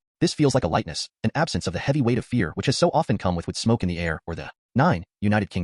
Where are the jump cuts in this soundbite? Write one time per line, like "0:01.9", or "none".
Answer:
none

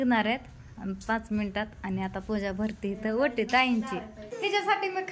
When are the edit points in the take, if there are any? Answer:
0:04.2

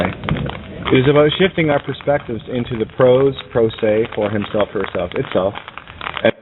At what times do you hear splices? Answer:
none

